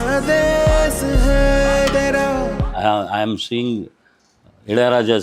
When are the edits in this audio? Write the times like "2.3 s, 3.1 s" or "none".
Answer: 2.6 s